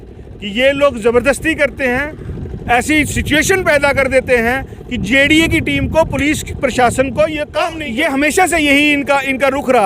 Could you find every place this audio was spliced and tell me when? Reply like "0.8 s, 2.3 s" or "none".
7.7 s